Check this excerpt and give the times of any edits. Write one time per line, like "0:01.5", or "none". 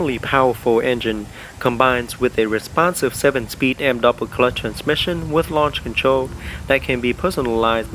none